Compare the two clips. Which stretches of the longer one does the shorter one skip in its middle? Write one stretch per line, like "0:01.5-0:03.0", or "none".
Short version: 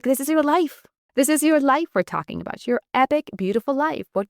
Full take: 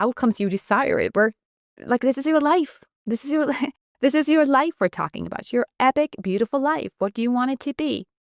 0:02.9-0:03.8